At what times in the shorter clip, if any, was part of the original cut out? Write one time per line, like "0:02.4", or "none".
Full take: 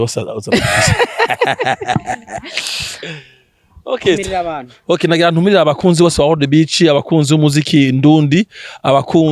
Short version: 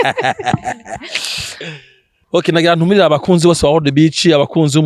0:02.1